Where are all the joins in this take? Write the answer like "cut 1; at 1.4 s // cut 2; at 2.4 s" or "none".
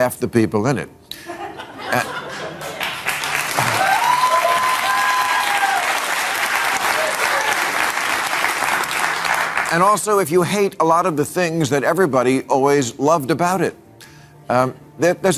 none